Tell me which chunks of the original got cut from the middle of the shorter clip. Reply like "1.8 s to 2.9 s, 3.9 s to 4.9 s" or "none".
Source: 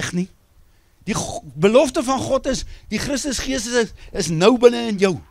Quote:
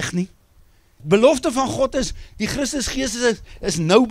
0.9 s to 1.4 s